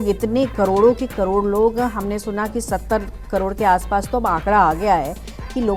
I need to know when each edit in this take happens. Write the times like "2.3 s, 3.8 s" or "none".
none